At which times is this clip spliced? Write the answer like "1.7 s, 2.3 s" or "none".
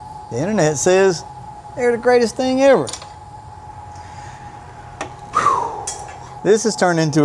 none